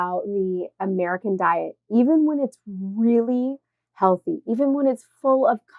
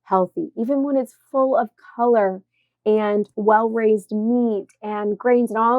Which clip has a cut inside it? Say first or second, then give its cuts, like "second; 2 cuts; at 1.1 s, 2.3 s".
second; 1 cut; at 3.3 s